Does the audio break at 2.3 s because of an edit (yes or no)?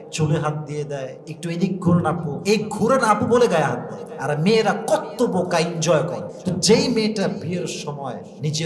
yes